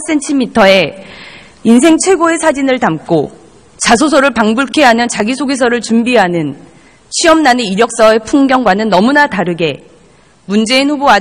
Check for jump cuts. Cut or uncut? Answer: uncut